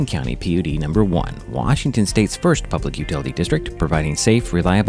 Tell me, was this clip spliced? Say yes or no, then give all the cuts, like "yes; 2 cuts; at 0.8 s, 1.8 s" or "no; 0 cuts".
no; 0 cuts